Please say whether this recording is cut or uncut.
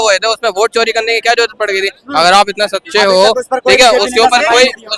uncut